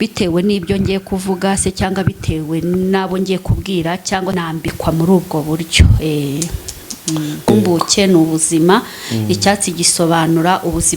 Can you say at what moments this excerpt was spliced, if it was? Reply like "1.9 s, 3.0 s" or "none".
4.4 s, 7.5 s